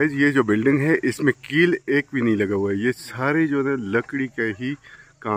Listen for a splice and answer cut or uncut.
uncut